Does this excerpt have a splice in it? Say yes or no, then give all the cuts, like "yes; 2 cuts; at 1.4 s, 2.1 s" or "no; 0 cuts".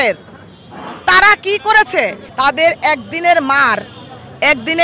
yes; 1 cut; at 2.2 s